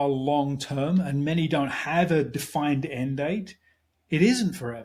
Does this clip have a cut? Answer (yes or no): no